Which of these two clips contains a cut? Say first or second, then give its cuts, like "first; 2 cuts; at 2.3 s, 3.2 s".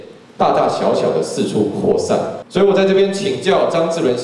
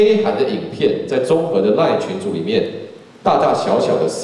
first; 1 cut; at 2.4 s